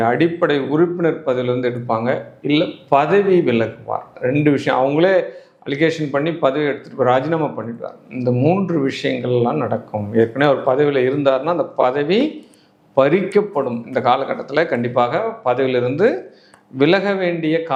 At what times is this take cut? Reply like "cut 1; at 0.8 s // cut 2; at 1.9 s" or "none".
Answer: none